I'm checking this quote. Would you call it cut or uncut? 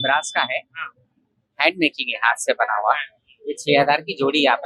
uncut